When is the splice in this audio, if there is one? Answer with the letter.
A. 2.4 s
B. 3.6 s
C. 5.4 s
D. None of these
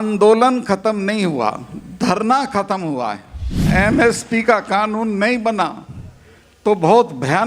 B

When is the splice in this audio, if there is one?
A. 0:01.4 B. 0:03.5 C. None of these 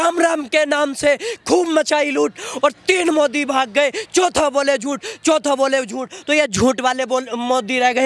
C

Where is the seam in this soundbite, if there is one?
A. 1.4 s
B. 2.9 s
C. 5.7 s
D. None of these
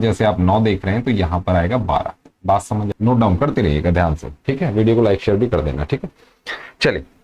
B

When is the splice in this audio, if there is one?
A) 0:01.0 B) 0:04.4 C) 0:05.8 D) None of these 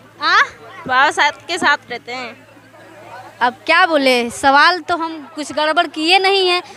D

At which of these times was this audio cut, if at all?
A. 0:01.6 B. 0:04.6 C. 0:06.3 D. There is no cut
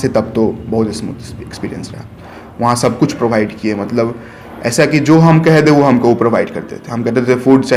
D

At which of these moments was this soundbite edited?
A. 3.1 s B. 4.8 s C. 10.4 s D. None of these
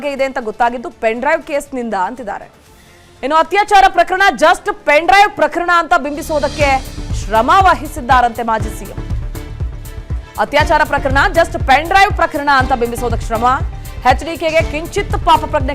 A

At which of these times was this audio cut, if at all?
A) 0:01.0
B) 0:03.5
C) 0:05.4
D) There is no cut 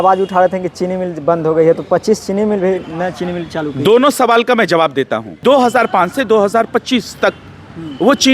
C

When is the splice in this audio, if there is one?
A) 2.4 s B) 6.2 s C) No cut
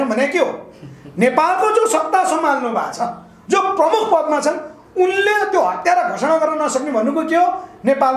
C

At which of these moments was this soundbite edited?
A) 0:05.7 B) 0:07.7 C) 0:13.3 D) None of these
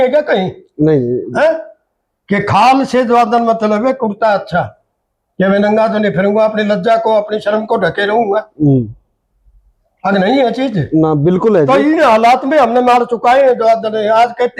D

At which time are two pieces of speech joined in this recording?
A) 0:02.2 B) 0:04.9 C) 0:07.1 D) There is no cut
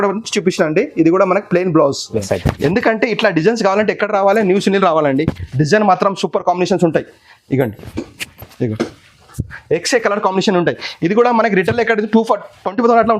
A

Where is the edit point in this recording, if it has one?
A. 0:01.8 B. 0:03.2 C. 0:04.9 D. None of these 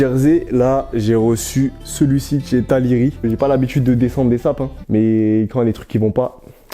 B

